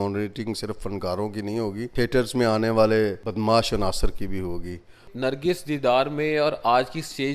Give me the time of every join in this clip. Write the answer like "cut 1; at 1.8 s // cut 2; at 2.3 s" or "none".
cut 1; at 1.9 s // cut 2; at 3.2 s // cut 3; at 5.1 s